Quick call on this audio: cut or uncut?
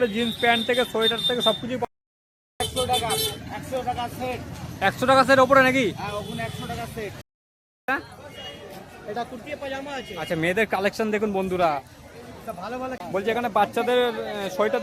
cut